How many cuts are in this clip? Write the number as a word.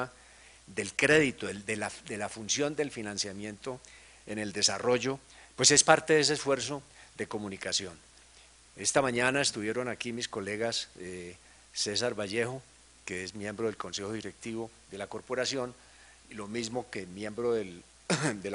one